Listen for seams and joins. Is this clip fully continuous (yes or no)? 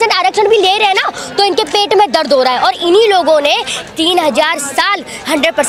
yes